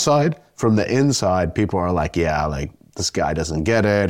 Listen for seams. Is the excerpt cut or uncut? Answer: uncut